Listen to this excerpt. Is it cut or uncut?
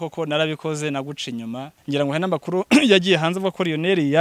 cut